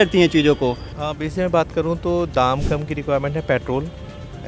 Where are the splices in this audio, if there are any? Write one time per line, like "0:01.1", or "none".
0:00.9